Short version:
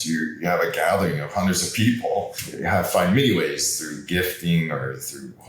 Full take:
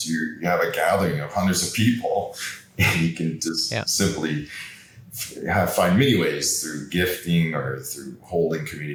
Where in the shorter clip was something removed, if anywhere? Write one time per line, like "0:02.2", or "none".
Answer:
0:02.4